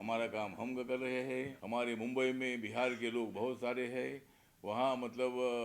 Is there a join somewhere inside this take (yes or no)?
yes